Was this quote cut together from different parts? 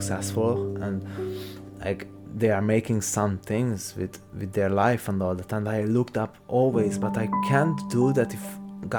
no; 0 cuts

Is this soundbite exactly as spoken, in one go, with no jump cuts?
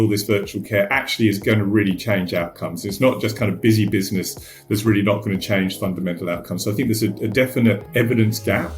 no; 1 cut; at 7.8 s

